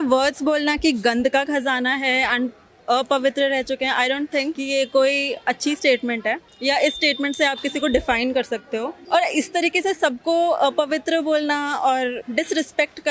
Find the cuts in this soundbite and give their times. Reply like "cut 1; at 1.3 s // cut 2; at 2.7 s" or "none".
cut 1; at 4.6 s // cut 2; at 6.5 s // cut 3; at 8.9 s // cut 4; at 12.2 s